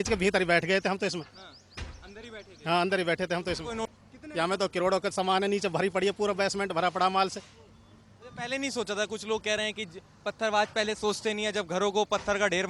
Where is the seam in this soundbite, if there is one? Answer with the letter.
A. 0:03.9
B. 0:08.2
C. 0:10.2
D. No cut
A